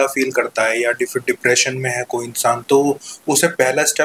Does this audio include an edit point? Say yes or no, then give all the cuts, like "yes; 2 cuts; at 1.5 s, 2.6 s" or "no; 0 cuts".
no; 0 cuts